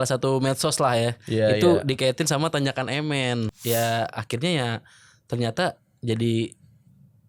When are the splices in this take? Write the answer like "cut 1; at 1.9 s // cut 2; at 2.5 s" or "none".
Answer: cut 1; at 3.5 s

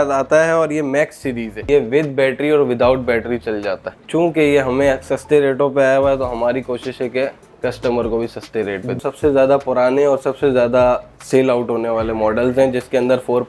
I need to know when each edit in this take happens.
cut 1; at 1.7 s // cut 2; at 4.0 s // cut 3; at 9.0 s

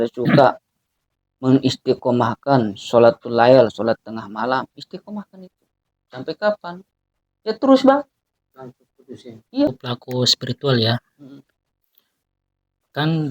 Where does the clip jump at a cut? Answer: cut 1; at 9.7 s

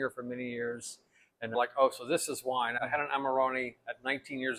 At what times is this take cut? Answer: cut 1; at 1.5 s // cut 2; at 2.8 s

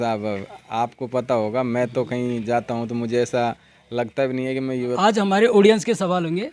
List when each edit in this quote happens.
cut 1; at 4.9 s

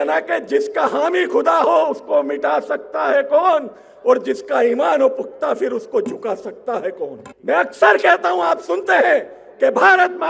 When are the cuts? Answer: cut 1; at 7.3 s

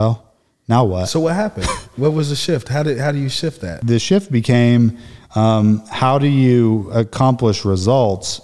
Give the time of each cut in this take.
cut 1; at 3.8 s

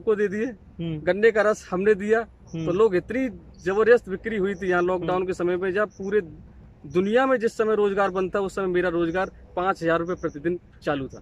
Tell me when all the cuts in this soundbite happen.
none

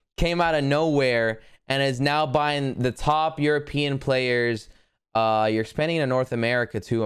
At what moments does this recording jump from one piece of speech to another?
none

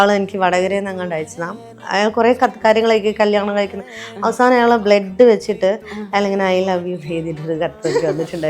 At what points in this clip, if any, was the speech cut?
cut 1; at 1.6 s

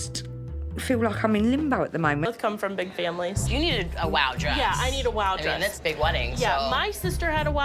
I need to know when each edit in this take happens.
cut 1; at 2.3 s

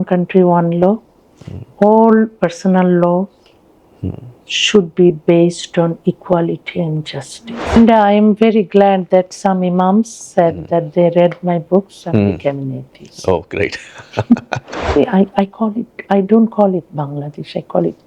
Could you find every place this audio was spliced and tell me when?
cut 1; at 7.8 s // cut 2; at 15.0 s

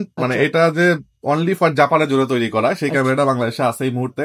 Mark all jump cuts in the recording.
none

